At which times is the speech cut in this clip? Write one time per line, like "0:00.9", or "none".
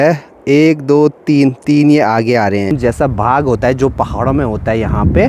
0:02.7